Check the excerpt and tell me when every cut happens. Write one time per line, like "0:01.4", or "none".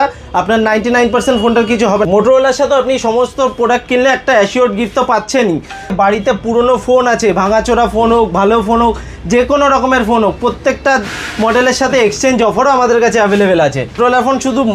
0:02.0
0:05.9
0:14.0